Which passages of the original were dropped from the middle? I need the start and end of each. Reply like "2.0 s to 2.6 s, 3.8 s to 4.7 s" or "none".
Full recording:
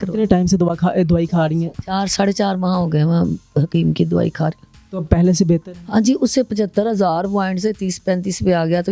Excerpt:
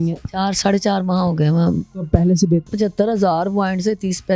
3.4 s to 4.9 s, 5.7 s to 6.5 s